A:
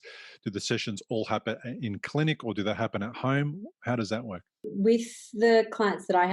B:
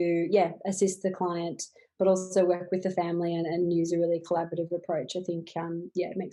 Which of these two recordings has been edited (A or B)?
A